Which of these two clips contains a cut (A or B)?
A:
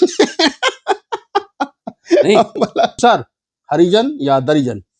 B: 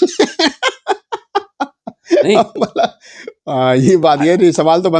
A